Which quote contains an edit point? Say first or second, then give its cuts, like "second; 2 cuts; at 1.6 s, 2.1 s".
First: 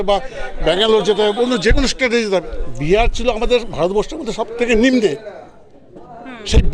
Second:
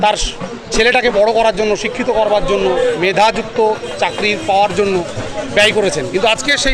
first; 1 cut; at 2.6 s